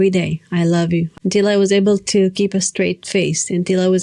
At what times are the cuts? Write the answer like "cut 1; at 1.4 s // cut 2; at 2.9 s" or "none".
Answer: cut 1; at 1.1 s